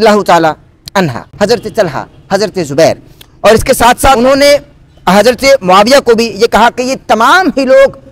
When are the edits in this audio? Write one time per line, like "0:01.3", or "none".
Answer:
0:01.2
0:04.2